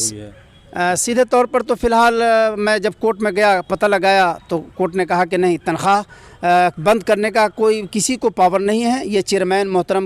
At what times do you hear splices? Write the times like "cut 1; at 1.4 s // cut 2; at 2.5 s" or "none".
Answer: none

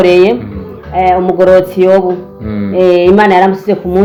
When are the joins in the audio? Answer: none

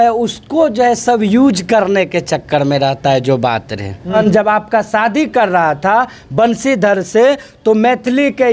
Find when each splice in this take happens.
cut 1; at 4.1 s

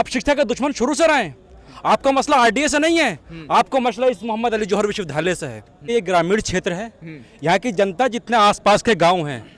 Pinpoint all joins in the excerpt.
cut 1; at 5.9 s

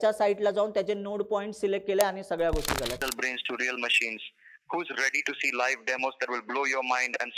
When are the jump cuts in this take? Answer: cut 1; at 3.0 s

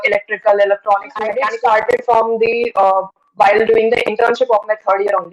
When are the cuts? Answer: cut 1; at 1.4 s

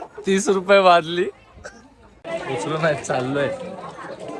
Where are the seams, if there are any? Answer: cut 1; at 2.2 s

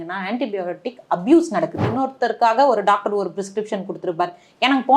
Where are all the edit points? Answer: cut 1; at 1.9 s

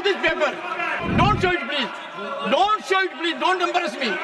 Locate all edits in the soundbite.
cut 1; at 1.0 s

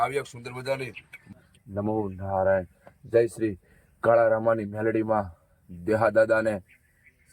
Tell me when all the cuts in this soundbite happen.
cut 1; at 1.3 s

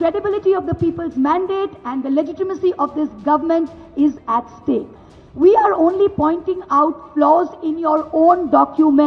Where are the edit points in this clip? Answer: cut 1; at 4.9 s

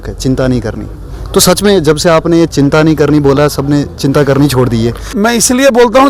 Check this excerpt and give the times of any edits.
cut 1; at 5.1 s

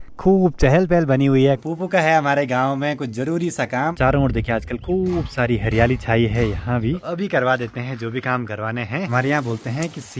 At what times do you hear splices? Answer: cut 1; at 1.6 s // cut 2; at 3.9 s // cut 3; at 7.0 s // cut 4; at 9.1 s

